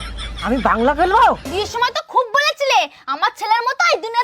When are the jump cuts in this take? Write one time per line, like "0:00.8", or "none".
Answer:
0:01.5

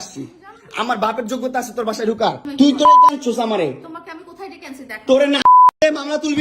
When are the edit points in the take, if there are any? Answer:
0:02.5

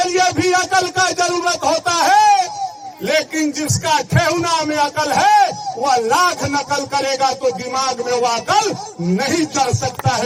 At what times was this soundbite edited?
none

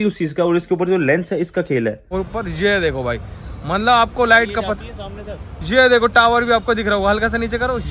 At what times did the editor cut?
0:02.0

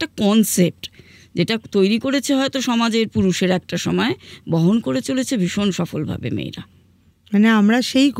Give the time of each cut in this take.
none

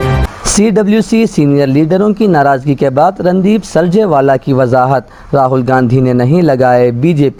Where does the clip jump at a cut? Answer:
none

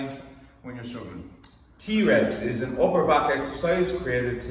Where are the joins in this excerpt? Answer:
0:01.8

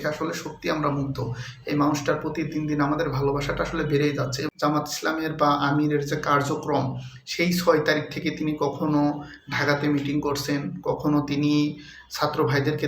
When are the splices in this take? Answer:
0:04.5

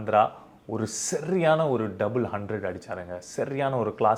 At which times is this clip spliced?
none

